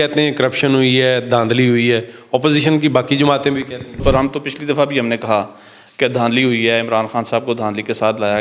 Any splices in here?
yes; 1 cut; at 4.0 s

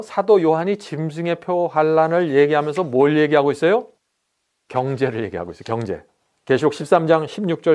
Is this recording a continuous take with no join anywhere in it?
yes; 0 cuts

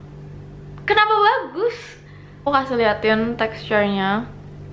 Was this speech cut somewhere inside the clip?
yes; 1 cut; at 2.5 s

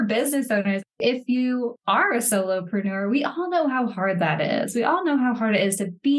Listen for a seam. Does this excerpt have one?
yes; 1 cut; at 1.0 s

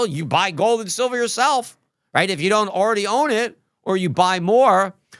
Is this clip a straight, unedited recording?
yes; 0 cuts

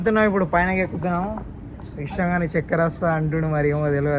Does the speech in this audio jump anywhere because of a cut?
no; 0 cuts

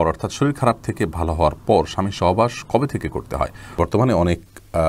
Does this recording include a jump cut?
yes; 1 cut; at 3.8 s

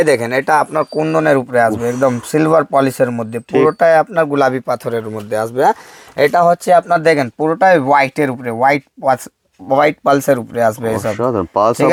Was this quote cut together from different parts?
no; 0 cuts

